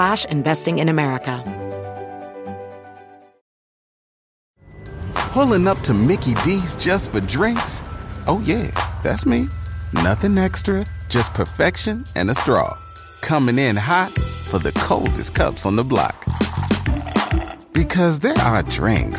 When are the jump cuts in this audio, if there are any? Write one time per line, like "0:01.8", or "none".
0:01.4